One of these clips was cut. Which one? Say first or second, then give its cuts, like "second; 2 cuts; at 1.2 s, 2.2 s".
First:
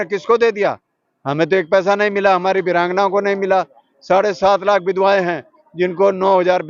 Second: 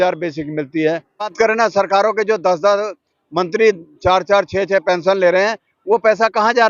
second; 1 cut; at 1.3 s